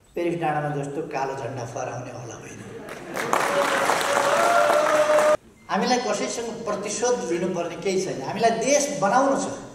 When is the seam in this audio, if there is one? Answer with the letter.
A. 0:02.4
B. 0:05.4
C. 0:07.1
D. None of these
B